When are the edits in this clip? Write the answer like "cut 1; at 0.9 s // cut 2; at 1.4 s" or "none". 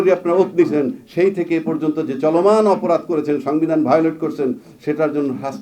none